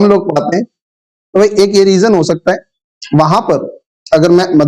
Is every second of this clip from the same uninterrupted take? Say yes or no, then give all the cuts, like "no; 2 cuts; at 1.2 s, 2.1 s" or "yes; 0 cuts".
yes; 0 cuts